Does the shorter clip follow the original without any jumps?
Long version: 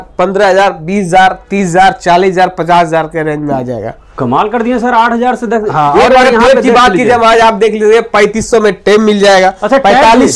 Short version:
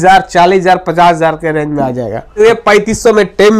no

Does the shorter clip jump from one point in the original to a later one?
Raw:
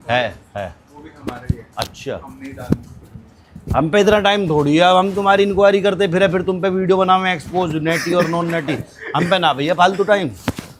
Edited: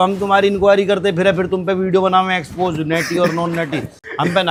no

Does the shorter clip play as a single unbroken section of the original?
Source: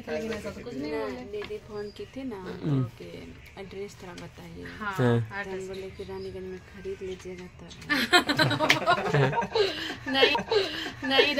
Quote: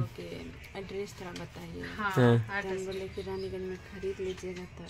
yes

